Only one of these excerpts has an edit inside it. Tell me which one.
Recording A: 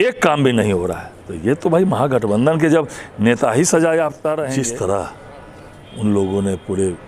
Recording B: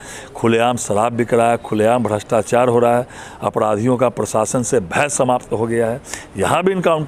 A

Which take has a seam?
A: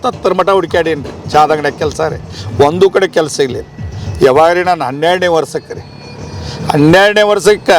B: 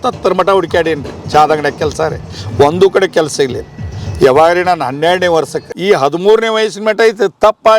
B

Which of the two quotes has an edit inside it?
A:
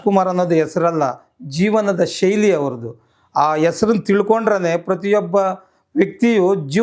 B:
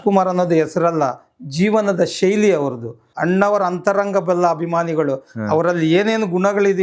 B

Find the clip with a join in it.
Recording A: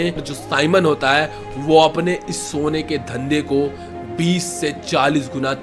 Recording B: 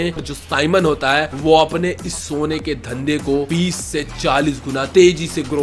B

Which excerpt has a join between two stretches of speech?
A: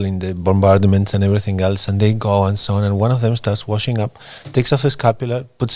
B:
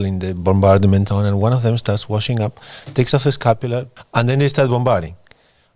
B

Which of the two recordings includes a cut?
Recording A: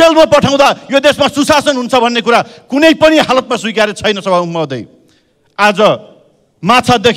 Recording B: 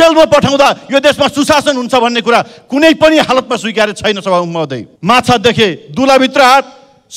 B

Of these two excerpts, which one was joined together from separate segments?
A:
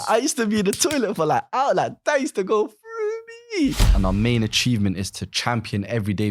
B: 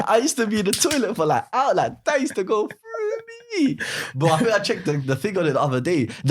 A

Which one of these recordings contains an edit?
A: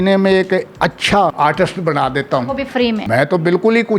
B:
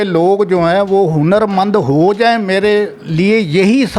A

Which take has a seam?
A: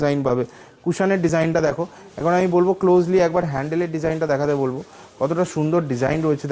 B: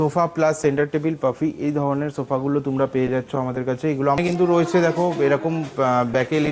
B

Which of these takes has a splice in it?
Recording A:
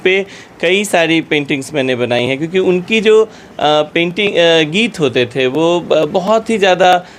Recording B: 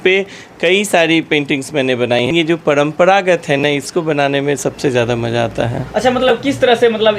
B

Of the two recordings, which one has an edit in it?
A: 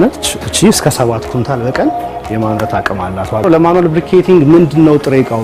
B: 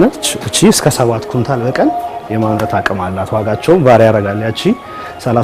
A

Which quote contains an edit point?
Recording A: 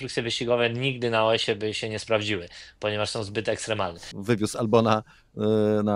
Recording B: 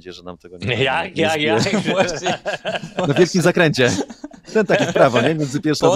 A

